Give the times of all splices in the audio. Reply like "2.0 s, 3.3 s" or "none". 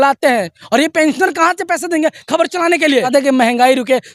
3.1 s

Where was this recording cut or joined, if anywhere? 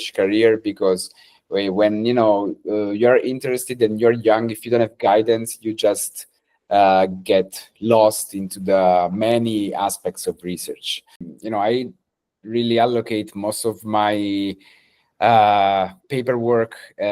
11.3 s

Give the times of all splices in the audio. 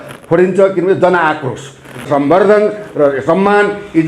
2.1 s

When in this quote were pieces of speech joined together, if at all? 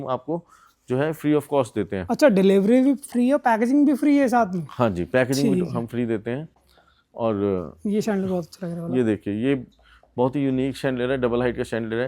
none

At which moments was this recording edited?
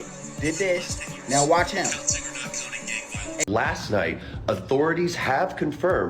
3.4 s

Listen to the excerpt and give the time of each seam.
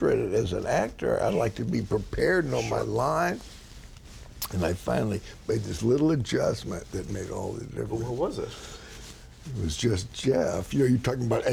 none

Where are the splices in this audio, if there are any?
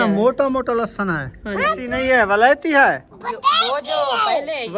1.8 s

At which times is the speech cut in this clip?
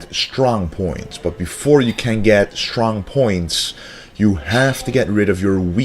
4.4 s

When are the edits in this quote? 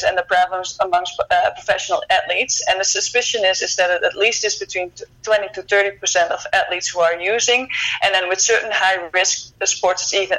none

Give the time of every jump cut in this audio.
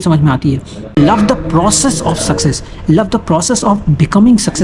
1.0 s

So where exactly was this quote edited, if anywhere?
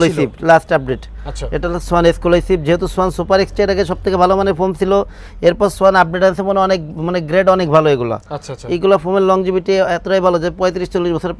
none

